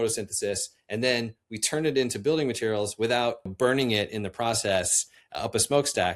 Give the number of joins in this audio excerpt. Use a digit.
1